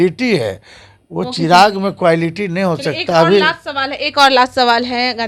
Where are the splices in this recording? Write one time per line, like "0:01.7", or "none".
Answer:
none